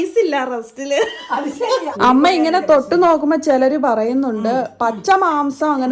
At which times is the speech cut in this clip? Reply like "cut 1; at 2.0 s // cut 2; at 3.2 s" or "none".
cut 1; at 1.9 s